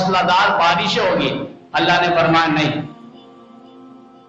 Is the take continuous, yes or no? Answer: yes